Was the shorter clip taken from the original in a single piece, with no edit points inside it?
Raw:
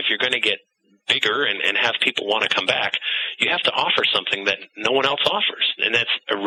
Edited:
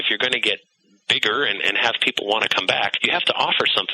no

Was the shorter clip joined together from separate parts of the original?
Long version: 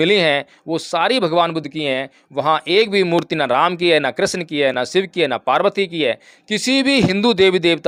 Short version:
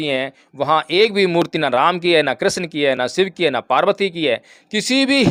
no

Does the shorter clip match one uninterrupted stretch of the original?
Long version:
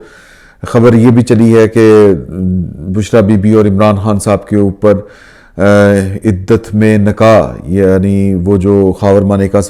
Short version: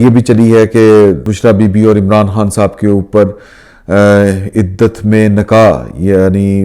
no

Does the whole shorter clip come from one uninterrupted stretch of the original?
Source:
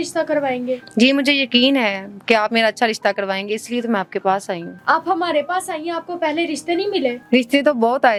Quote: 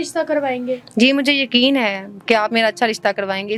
yes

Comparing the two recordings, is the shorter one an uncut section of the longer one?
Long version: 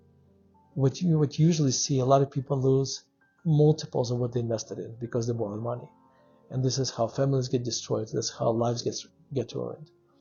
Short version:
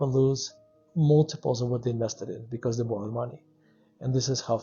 yes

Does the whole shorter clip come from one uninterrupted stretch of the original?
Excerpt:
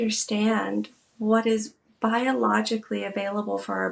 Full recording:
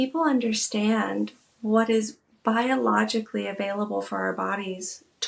yes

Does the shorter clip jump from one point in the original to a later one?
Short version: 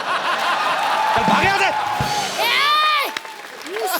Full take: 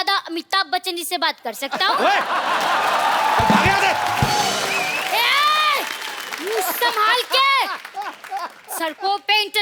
yes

